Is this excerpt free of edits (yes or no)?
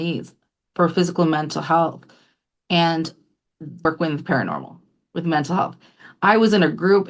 no